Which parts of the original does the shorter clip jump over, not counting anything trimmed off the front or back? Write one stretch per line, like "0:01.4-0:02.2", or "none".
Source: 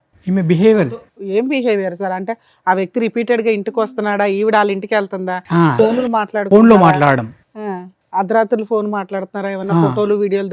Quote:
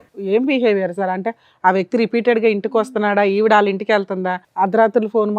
0:05.4-0:07.9